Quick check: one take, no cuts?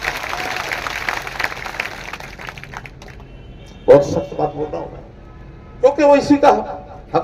yes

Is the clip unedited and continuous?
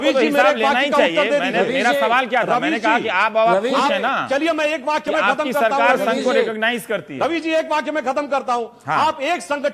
yes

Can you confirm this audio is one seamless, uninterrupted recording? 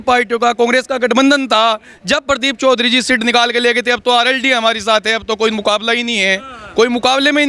yes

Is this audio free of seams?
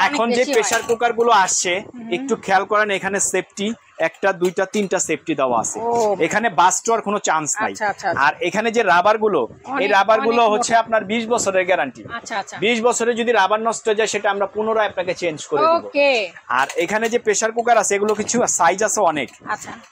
yes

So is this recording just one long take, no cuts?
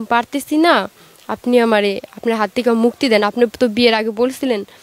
yes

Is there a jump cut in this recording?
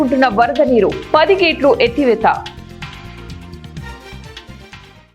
yes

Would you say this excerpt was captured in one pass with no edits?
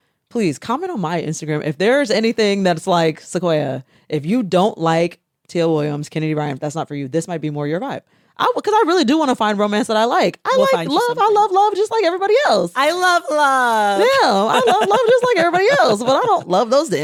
yes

